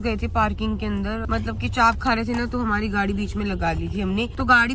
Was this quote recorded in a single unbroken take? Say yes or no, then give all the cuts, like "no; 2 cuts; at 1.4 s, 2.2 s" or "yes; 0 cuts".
yes; 0 cuts